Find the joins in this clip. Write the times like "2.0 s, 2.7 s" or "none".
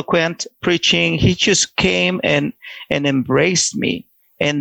none